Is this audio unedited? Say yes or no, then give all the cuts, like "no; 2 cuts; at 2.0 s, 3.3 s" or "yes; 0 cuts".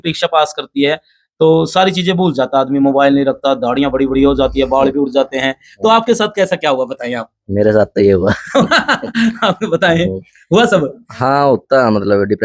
yes; 0 cuts